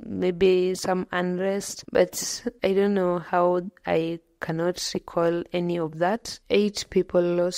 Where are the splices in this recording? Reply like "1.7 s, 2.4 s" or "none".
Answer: 1.7 s, 6.3 s